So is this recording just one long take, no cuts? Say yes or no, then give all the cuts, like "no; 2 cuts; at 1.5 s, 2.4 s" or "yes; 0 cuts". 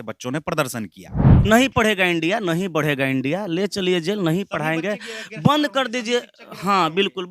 no; 1 cut; at 1.3 s